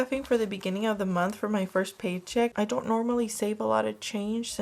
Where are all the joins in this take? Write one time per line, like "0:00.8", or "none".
0:02.5